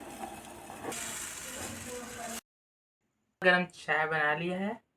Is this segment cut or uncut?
cut